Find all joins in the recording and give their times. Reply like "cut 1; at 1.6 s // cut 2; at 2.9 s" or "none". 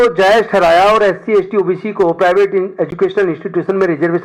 none

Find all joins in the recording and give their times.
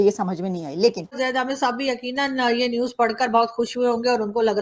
cut 1; at 1.2 s

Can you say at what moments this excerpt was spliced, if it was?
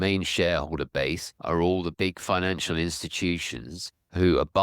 cut 1; at 1.3 s // cut 2; at 1.9 s

